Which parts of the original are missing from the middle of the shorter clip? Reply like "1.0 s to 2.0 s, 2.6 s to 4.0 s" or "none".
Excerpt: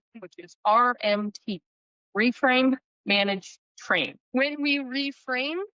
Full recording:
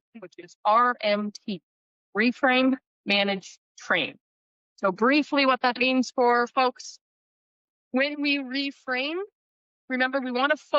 4.2 s to 7.8 s